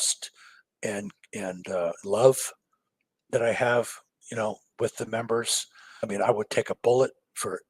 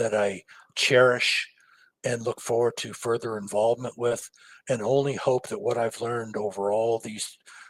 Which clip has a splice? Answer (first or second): first